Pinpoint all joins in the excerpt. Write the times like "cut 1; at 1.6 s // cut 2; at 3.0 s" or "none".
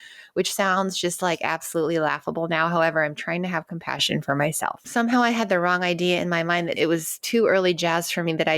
cut 1; at 4.7 s // cut 2; at 6.7 s

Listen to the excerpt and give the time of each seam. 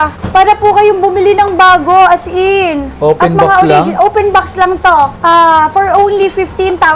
none

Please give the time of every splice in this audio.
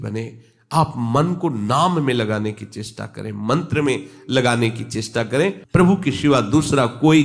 cut 1; at 5.6 s

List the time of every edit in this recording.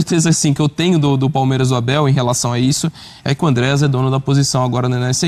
none

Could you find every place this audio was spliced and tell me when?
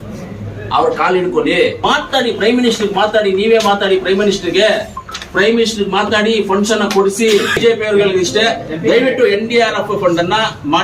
cut 1; at 1.8 s // cut 2; at 7.5 s

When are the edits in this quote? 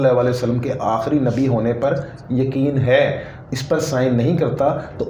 none

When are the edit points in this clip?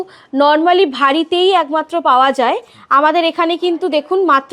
none

